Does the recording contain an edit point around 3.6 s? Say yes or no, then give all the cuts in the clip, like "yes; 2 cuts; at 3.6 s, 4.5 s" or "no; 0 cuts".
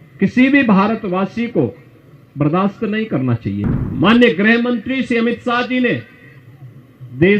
yes; 1 cut; at 3.6 s